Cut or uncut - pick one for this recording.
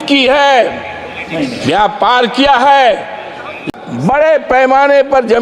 cut